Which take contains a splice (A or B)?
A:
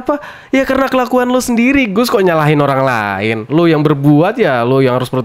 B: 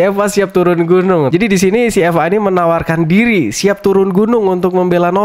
B